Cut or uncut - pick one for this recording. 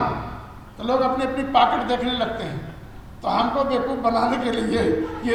uncut